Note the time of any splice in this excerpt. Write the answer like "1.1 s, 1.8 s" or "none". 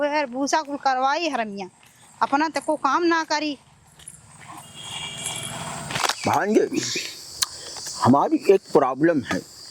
5.9 s